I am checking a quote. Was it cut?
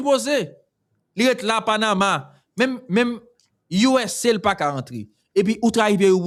no; 0 cuts

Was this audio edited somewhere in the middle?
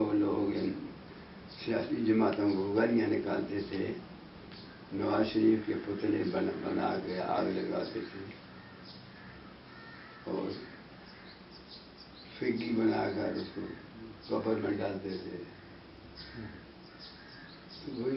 no; 0 cuts

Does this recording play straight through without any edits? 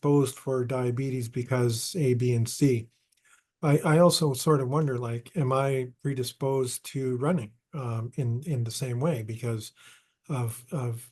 yes; 0 cuts

